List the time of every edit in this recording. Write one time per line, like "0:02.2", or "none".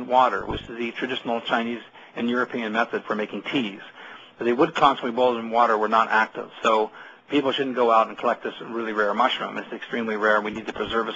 0:02.5